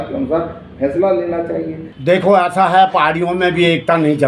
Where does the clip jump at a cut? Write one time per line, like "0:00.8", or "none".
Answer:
0:01.8